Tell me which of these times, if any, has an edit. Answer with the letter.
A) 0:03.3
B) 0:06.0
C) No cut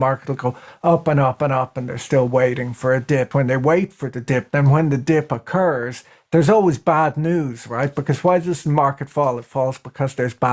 A